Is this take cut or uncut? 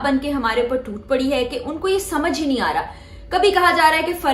uncut